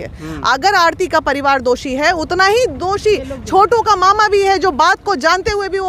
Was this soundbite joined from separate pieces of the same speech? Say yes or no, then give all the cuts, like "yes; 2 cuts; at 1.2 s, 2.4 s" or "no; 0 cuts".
no; 0 cuts